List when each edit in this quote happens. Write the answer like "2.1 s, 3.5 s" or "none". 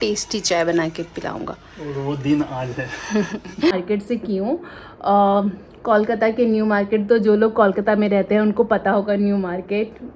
3.7 s